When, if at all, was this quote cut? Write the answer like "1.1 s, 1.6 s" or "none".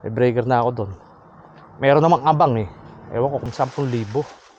3.5 s